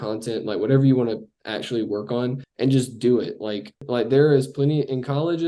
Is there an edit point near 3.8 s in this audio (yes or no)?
yes